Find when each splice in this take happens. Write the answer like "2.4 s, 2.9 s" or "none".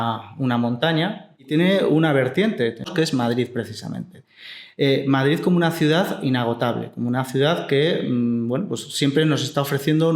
1.5 s, 2.9 s